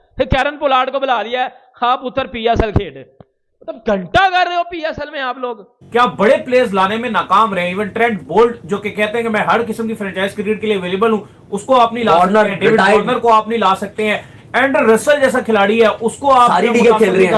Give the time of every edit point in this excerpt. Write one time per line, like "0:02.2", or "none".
0:05.7